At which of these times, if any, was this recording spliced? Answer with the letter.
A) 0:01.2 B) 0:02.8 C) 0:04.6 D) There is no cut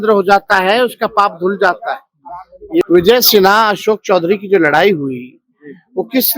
B